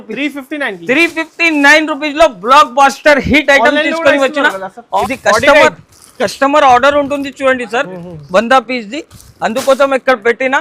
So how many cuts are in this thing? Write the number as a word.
one